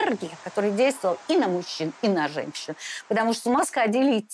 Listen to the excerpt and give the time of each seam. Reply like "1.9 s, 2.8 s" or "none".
none